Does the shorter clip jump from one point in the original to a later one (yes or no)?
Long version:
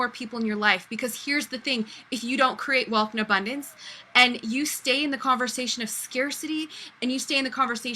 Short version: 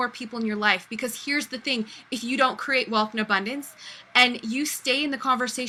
no